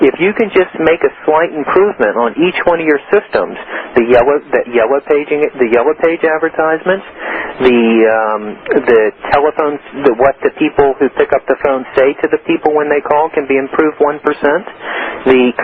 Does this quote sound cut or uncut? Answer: uncut